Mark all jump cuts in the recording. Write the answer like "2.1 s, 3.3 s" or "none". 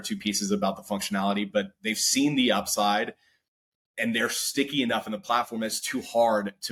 none